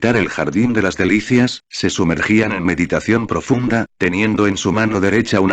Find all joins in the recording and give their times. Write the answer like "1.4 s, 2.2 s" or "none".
4.5 s